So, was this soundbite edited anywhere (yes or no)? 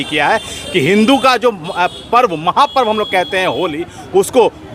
no